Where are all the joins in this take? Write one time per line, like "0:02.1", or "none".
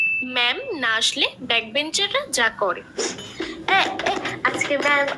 0:00.9